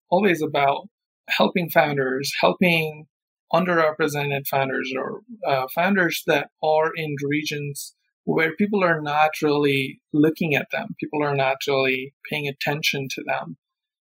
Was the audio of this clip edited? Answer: yes; 1 cut; at 1.3 s

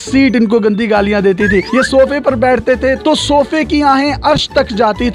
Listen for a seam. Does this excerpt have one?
no; 0 cuts

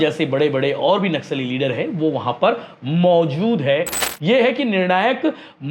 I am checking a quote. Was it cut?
yes; 1 cut; at 4.1 s

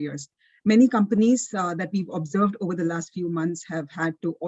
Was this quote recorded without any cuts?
yes; 0 cuts

